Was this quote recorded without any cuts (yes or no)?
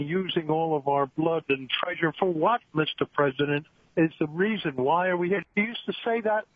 no